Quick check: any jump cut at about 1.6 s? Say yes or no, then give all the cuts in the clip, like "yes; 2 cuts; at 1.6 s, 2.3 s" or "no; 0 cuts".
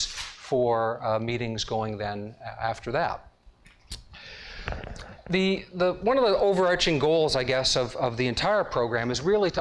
yes; 1 cut; at 1.6 s